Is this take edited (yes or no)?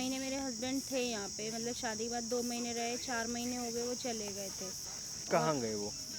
no